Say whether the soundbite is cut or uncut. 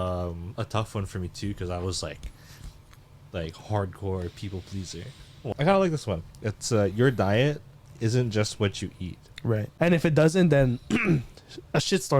cut